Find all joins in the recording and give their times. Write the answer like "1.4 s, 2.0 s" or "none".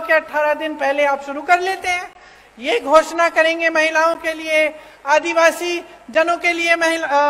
none